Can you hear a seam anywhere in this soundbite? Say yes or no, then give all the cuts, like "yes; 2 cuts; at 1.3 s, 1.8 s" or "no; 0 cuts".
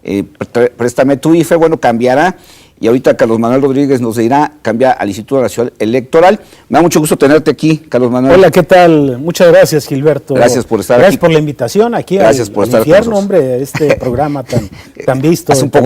no; 0 cuts